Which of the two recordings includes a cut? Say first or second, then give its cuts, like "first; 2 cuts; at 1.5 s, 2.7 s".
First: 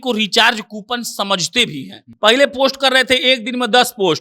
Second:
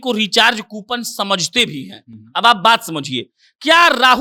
first; 1 cut; at 2.0 s